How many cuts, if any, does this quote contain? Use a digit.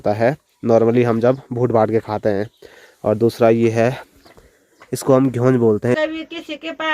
1